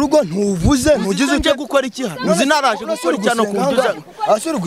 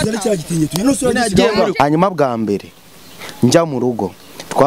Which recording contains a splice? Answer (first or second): second